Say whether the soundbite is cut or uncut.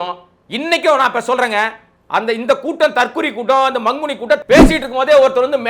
cut